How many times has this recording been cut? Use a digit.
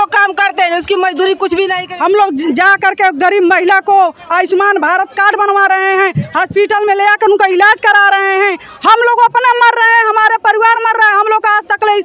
1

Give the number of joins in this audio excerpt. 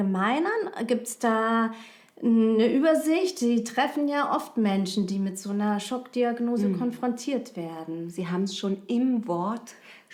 0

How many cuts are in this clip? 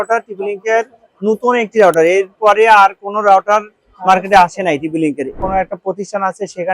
1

